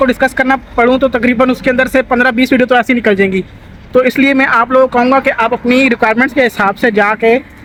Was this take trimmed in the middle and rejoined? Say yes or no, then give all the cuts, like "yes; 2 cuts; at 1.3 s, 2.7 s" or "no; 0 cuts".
no; 0 cuts